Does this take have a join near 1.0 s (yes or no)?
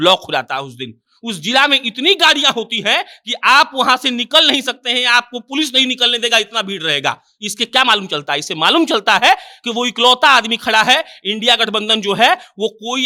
no